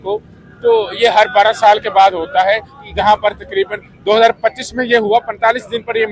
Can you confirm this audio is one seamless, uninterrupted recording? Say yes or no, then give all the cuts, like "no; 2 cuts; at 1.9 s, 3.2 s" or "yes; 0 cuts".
yes; 0 cuts